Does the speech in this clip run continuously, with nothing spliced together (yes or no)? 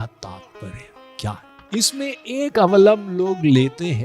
no